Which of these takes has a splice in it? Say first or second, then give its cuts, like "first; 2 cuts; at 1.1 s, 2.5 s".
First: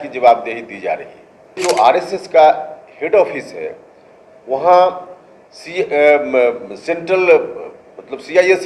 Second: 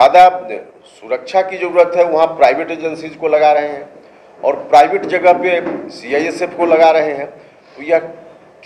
first; 1 cut; at 1.6 s